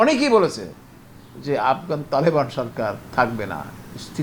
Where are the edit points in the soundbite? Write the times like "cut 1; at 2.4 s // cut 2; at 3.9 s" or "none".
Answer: cut 1; at 3.0 s